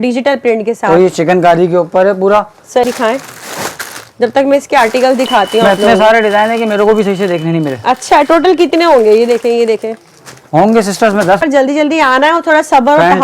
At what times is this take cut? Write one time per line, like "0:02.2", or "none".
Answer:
0:02.8
0:11.4